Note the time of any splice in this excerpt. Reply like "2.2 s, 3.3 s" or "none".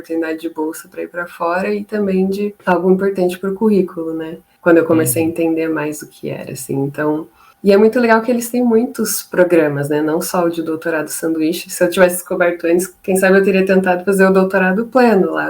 2.6 s